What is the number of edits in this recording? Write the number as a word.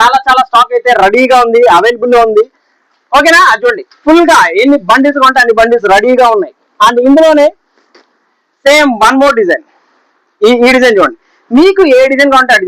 zero